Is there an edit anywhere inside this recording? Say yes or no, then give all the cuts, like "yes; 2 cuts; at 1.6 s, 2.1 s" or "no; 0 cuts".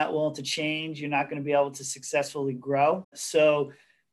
yes; 1 cut; at 3.2 s